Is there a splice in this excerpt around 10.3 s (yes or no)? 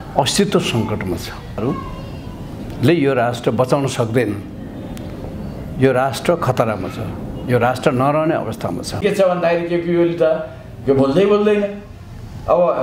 no